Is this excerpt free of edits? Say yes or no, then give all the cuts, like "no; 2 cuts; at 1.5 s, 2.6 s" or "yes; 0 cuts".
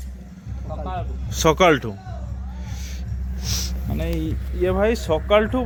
yes; 0 cuts